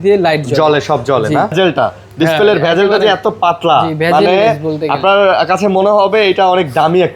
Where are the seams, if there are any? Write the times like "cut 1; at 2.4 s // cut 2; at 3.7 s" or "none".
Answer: cut 1; at 1.5 s